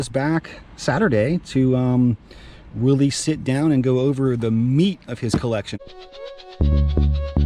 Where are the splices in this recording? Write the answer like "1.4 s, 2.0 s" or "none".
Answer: 5.7 s